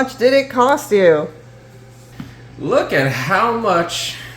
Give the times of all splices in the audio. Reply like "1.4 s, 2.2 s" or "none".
1.7 s